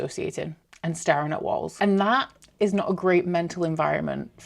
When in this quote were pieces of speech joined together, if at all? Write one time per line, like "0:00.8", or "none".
none